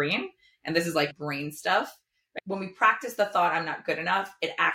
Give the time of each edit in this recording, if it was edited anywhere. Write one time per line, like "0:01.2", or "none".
0:01.1
0:02.4